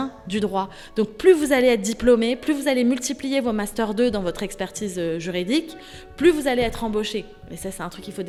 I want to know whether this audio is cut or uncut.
uncut